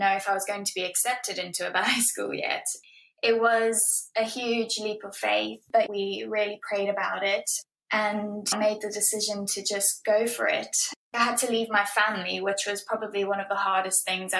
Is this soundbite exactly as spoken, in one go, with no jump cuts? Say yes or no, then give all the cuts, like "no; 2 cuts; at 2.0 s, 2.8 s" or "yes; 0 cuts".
yes; 0 cuts